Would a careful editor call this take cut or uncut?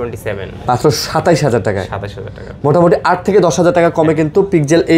uncut